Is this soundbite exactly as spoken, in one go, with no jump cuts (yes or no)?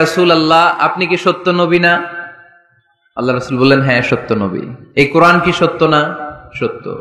yes